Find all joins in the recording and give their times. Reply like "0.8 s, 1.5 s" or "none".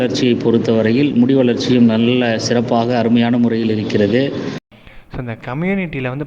4.7 s